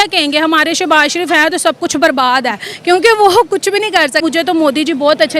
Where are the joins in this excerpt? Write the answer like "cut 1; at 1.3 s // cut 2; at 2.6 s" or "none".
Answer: cut 1; at 4.2 s